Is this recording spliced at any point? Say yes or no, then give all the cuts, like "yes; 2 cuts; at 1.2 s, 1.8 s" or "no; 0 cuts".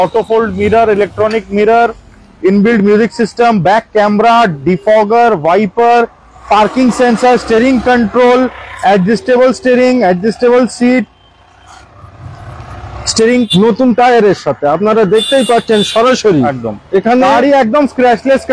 yes; 1 cut; at 13.5 s